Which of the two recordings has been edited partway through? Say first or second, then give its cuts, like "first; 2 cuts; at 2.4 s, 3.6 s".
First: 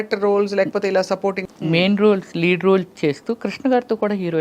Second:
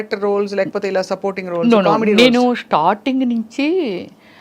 first; 1 cut; at 1.4 s